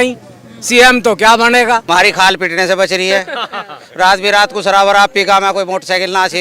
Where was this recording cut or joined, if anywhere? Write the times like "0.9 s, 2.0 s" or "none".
1.8 s